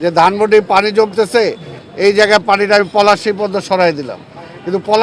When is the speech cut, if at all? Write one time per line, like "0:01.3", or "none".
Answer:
none